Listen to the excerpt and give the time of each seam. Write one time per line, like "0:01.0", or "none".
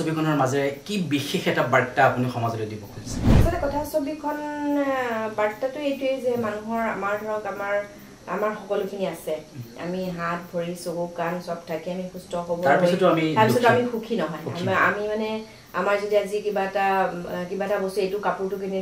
0:03.2